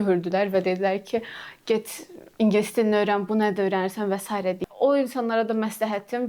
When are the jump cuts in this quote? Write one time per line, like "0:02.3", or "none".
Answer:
0:04.6

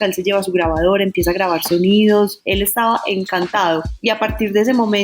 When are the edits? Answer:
0:02.4
0:03.9

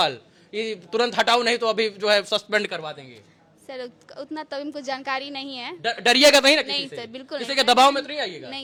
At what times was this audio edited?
none

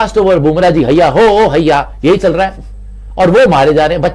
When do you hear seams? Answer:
none

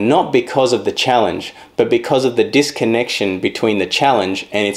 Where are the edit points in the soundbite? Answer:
none

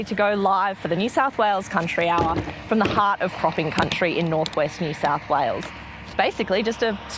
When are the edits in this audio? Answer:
none

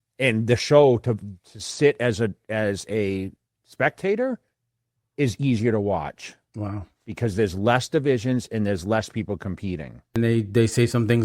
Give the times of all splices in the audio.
0:10.2

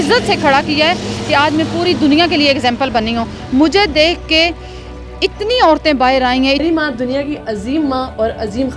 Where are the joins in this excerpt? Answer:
0:06.6

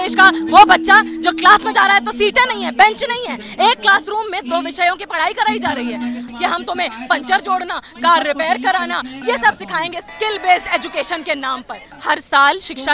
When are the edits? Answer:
0:06.3
0:09.1
0:10.1
0:11.9

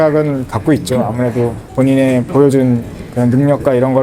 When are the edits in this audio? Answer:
0:01.6

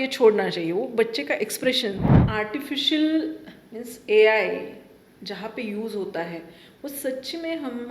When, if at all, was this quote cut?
0:02.1

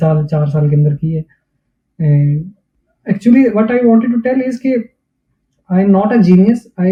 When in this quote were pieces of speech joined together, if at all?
none

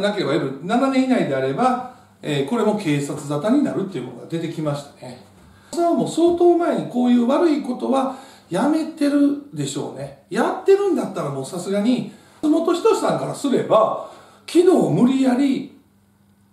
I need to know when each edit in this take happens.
0:05.7
0:12.4

